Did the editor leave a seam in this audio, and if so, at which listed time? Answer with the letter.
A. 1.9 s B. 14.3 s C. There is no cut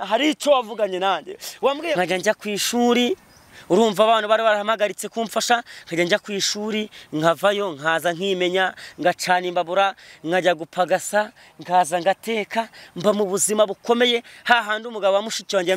A